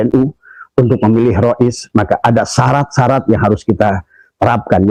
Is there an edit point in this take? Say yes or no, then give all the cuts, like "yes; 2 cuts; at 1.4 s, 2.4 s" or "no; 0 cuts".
no; 0 cuts